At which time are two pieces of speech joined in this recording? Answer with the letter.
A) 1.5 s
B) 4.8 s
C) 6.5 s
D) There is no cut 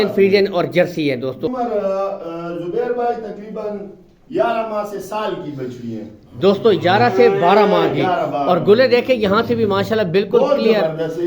A